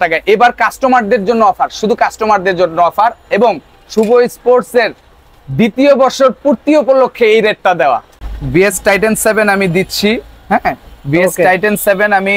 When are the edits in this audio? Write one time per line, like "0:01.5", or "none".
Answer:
0:08.1